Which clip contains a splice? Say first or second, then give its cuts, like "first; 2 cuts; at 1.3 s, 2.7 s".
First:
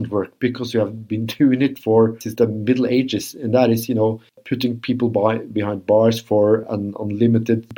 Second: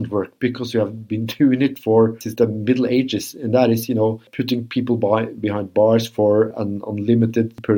second; 1 cut; at 4.3 s